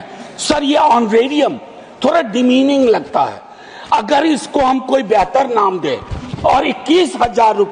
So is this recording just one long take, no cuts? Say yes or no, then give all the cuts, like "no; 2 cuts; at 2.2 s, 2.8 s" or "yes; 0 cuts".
yes; 0 cuts